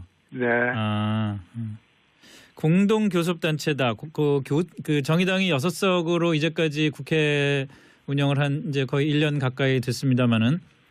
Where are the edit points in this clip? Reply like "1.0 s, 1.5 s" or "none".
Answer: none